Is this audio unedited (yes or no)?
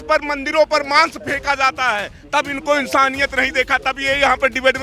yes